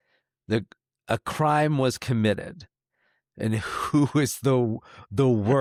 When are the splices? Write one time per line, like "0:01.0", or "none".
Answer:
none